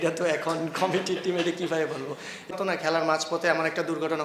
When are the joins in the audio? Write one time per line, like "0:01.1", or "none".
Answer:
0:02.5